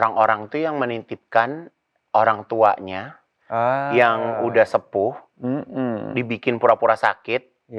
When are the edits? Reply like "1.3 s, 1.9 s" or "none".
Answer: none